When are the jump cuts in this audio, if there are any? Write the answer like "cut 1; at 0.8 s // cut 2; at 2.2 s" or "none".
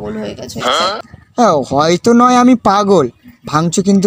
cut 1; at 1.0 s